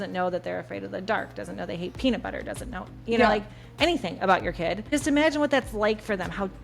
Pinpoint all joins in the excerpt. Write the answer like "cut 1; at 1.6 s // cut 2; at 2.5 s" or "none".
cut 1; at 4.9 s